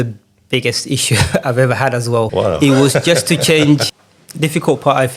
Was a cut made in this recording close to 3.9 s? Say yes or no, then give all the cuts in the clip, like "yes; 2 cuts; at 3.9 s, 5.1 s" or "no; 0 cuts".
yes; 2 cuts; at 2.3 s, 3.9 s